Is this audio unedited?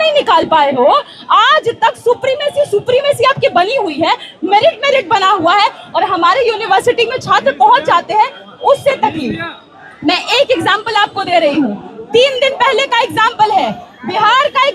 yes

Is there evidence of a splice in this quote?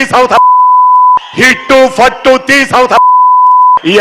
yes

